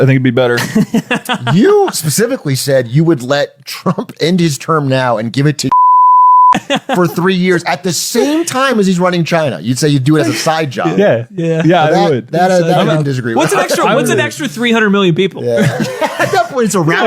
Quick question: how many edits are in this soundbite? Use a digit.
0